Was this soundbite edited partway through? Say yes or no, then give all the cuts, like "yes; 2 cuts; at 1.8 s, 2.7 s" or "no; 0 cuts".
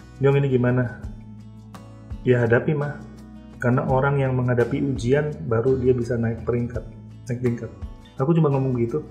no; 0 cuts